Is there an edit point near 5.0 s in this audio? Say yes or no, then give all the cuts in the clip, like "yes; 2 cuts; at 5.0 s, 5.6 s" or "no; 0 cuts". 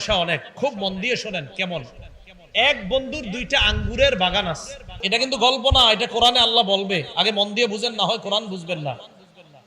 yes; 1 cut; at 5.0 s